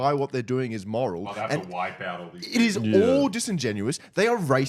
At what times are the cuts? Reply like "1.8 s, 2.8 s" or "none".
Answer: none